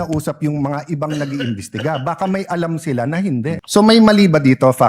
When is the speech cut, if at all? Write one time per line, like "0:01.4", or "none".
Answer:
0:03.6